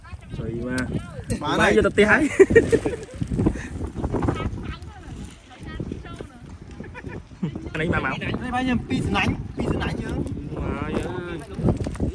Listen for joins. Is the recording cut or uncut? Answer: cut